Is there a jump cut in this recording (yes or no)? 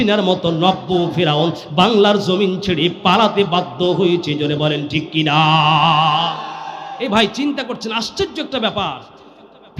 no